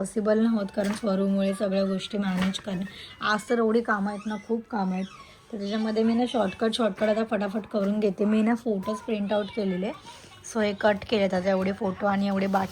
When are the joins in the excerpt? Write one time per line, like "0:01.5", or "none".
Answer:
none